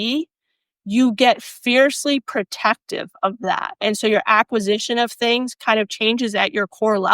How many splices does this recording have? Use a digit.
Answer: 1